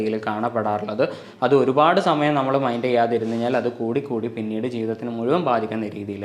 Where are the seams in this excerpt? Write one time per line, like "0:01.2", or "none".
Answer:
0:01.2